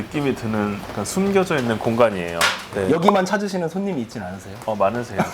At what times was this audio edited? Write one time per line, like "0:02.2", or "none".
0:02.7